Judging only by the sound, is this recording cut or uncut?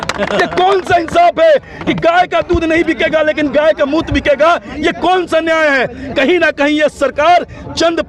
uncut